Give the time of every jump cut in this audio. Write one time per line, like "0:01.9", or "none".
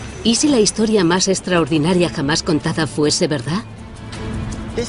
0:01.7